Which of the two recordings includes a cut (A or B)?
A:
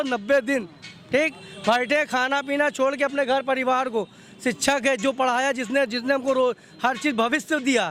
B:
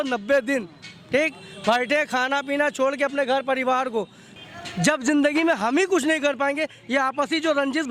B